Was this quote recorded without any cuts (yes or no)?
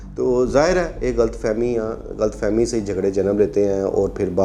yes